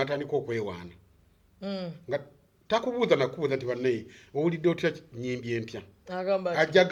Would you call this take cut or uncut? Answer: uncut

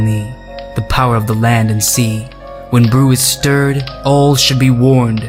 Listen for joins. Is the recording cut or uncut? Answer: uncut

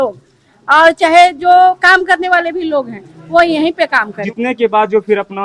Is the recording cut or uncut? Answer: cut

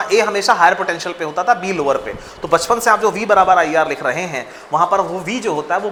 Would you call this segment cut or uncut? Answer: uncut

